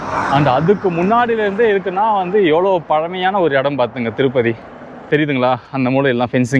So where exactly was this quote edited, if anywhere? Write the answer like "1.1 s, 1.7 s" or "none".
5.0 s